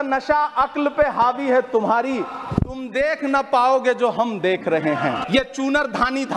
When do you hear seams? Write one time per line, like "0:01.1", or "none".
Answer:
0:05.2